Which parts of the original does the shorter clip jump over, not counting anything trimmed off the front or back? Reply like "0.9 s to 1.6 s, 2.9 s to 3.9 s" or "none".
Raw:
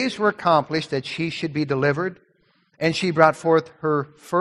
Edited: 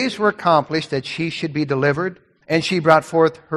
2.3 s to 2.6 s